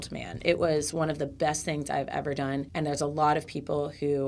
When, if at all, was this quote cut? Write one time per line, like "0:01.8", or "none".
0:02.7